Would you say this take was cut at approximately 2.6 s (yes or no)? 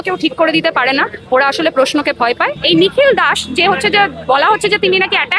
yes